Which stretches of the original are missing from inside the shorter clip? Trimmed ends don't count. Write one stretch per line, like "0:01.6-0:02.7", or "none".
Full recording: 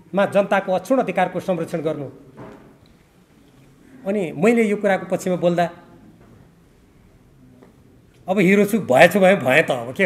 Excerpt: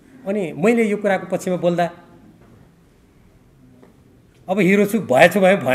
none